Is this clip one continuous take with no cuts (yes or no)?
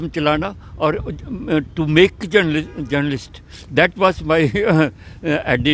yes